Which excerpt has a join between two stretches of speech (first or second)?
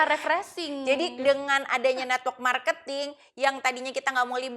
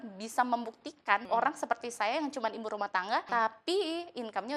second